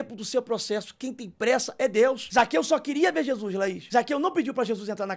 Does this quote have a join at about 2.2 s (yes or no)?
yes